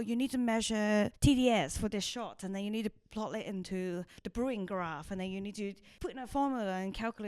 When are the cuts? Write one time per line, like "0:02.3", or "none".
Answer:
0:01.1
0:04.2
0:05.6